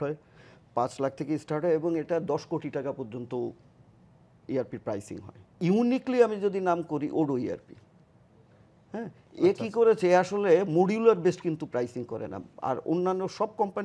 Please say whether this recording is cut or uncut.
cut